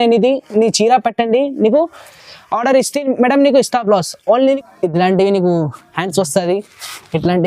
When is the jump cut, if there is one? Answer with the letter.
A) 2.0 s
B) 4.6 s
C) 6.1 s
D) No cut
B